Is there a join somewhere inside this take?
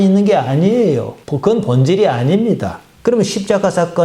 yes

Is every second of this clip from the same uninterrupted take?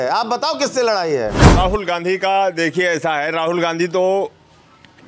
no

